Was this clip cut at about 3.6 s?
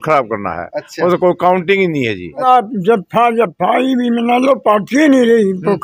no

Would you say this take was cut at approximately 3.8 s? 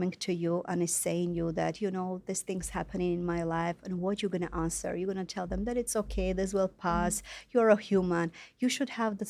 no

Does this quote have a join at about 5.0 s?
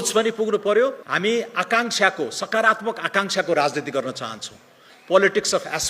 no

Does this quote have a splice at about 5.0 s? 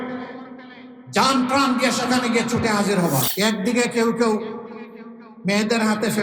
no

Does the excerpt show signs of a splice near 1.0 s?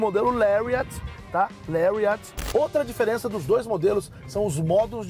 no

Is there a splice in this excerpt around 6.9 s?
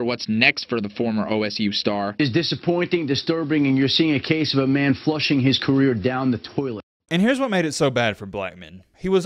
no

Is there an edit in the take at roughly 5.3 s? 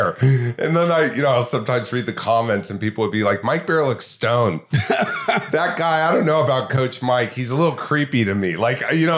no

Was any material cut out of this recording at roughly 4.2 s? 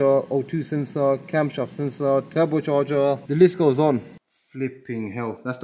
yes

